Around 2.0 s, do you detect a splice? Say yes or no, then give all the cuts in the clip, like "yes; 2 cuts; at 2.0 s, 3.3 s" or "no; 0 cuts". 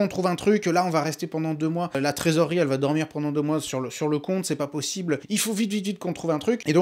yes; 2 cuts; at 2.0 s, 5.2 s